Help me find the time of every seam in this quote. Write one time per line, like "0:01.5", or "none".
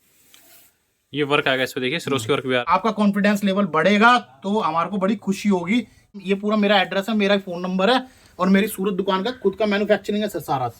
0:02.6
0:06.2